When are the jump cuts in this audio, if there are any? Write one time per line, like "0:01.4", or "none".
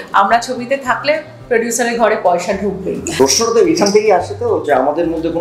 0:03.1